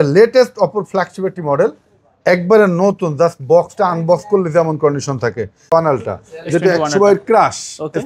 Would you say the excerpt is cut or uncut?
cut